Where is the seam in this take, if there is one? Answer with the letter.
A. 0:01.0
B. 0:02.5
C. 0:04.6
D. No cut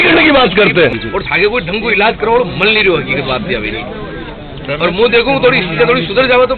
A